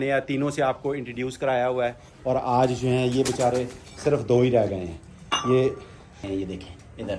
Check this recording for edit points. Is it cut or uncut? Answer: uncut